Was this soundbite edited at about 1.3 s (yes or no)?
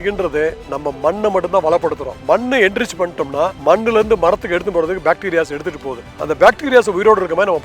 no